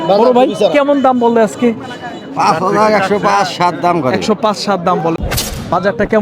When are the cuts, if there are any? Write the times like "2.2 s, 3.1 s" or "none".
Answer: 5.2 s